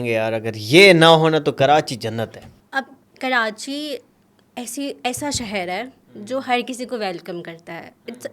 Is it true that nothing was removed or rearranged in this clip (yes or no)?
yes